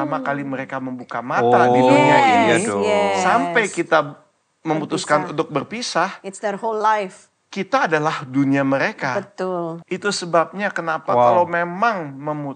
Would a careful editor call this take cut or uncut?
cut